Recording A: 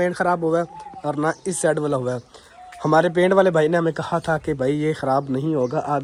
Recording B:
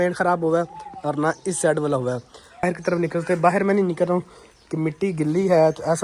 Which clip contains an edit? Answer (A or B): B